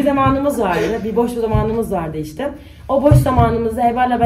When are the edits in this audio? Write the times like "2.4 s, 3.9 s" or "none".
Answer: none